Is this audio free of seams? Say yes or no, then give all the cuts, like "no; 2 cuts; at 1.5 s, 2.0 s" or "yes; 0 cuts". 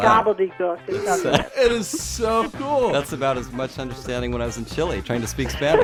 yes; 0 cuts